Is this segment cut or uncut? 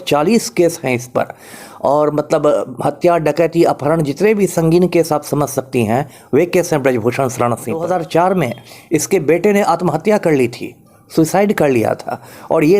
cut